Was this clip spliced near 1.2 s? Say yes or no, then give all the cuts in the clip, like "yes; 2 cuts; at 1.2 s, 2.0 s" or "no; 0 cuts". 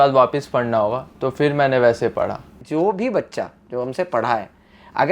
no; 1 cut; at 2.5 s